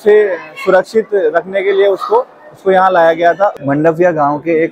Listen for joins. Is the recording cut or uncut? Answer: cut